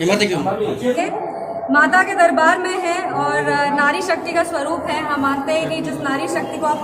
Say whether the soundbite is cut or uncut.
cut